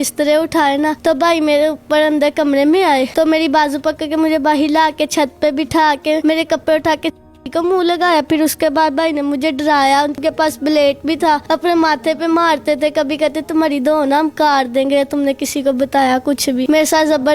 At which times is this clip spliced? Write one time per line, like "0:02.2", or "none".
0:01.0
0:03.1
0:06.2
0:10.2
0:11.4
0:16.6

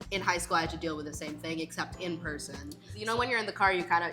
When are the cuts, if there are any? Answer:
0:02.9

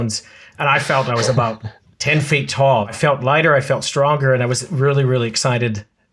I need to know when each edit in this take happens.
0:02.9

